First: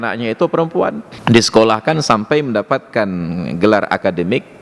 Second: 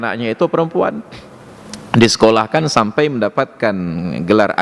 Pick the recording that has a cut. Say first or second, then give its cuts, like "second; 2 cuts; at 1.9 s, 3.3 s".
first; 1 cut; at 1.1 s